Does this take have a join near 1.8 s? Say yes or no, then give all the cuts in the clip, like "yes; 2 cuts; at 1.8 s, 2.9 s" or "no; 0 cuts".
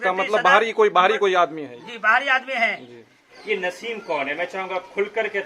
no; 1 cut; at 3.3 s